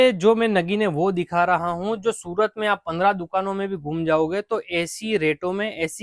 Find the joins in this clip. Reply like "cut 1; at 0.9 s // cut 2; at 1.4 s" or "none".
none